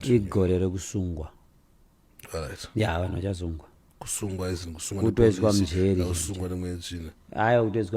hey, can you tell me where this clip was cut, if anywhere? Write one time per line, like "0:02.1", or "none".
none